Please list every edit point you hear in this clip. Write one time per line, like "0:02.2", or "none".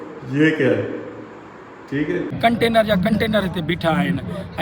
0:02.3